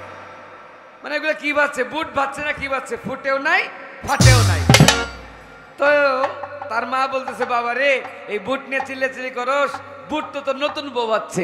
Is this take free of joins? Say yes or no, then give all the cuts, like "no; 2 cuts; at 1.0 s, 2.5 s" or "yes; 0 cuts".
yes; 0 cuts